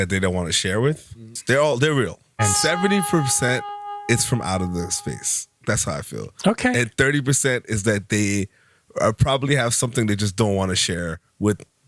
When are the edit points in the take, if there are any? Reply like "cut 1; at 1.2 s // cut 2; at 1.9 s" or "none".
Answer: cut 1; at 1.3 s // cut 2; at 2.3 s